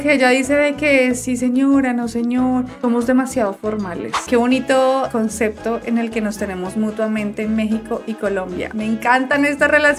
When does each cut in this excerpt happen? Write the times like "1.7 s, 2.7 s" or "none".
4.1 s